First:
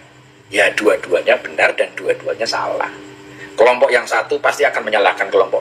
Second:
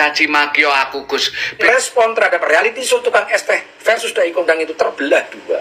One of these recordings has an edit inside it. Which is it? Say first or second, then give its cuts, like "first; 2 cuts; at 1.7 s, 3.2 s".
second; 1 cut; at 1.6 s